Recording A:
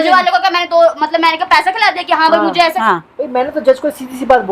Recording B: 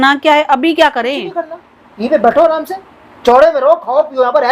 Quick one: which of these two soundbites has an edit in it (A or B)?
A